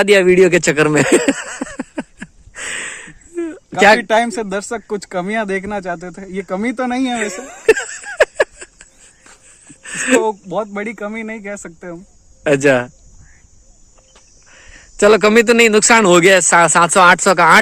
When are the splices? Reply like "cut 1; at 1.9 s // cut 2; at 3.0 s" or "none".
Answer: none